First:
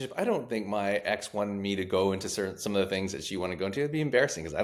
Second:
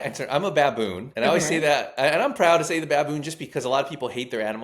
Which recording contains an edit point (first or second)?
second